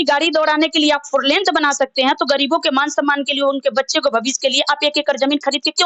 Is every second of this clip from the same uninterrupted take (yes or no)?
yes